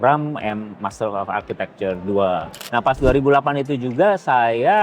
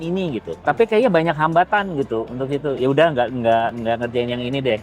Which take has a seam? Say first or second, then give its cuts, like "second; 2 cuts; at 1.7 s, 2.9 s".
first; 1 cut; at 2.6 s